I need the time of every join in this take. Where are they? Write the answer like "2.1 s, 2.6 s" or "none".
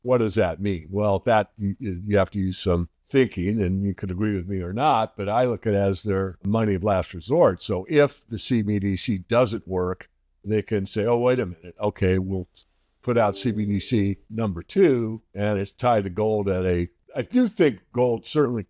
17.0 s